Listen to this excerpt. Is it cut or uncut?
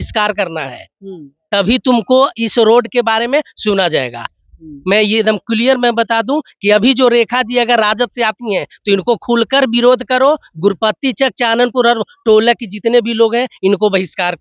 uncut